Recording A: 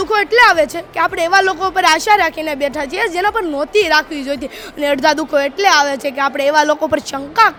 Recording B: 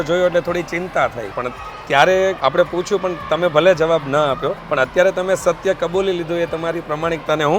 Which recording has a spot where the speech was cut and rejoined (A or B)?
B